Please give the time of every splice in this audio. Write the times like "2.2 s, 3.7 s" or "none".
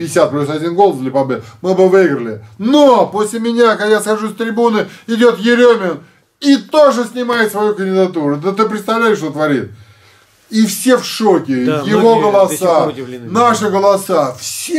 none